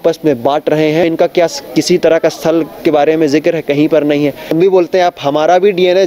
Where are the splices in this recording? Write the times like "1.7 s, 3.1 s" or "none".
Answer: 1.0 s, 4.5 s